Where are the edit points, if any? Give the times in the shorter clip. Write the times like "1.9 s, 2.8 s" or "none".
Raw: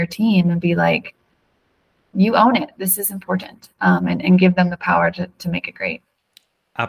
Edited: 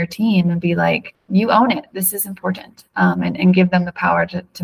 1.1 s